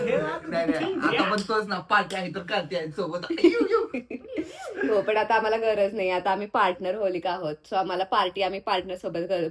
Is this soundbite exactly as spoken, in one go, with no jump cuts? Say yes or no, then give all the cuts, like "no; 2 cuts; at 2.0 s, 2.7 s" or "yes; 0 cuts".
yes; 0 cuts